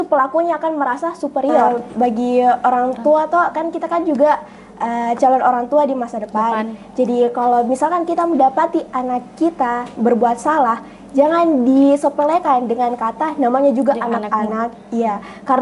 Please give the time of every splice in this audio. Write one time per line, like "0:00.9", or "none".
0:01.7